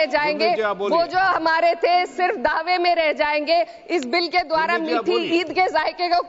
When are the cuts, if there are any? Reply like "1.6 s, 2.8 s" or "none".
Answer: none